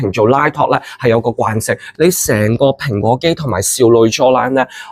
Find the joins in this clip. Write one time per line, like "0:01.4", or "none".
0:01.8